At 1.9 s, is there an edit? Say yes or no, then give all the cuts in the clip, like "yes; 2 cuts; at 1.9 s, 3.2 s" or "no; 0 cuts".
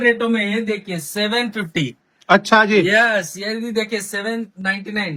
no; 0 cuts